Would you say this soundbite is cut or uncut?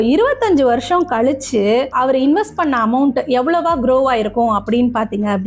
cut